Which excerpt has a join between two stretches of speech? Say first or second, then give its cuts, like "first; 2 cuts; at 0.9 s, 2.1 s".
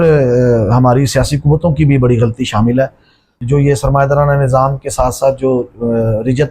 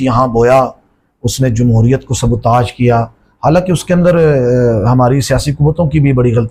first; 1 cut; at 3.3 s